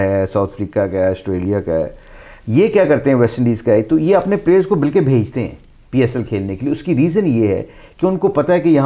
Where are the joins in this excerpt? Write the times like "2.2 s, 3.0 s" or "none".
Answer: none